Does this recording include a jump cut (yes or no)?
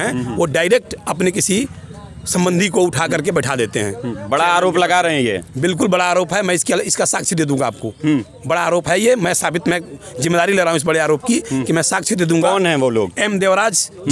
no